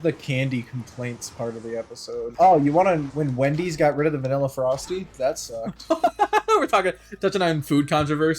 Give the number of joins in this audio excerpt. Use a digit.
2